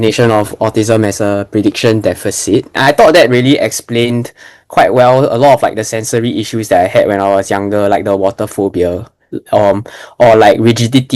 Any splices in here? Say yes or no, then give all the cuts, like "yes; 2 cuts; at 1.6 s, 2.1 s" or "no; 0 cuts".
yes; 1 cut; at 2.8 s